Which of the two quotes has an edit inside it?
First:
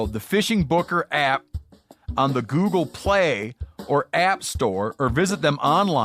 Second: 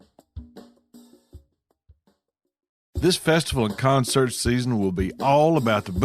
second; 1 cut; at 3.0 s

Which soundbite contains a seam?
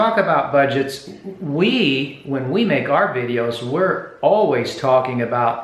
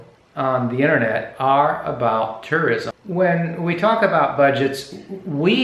second; 1 cut; at 2.9 s

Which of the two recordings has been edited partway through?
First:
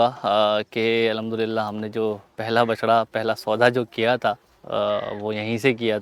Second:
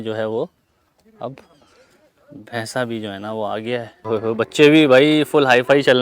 second; 1 cut; at 4.1 s

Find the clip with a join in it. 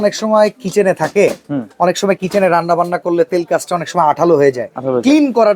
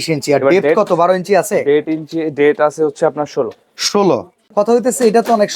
second; 1 cut; at 4.4 s

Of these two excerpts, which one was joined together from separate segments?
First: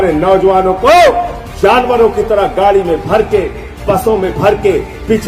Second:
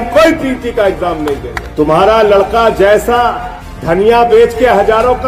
second; 1 cut; at 1.6 s

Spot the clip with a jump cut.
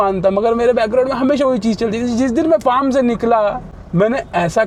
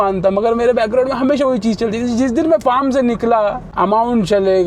second; 1 cut; at 3.6 s

